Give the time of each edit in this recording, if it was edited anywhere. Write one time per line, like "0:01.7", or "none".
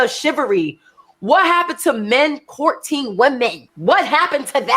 0:03.7